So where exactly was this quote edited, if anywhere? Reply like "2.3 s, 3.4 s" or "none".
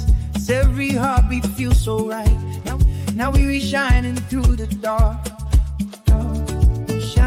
none